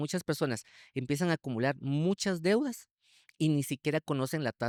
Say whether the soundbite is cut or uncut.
uncut